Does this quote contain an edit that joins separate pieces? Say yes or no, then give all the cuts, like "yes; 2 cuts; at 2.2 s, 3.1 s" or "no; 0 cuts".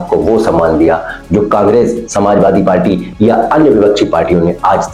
no; 0 cuts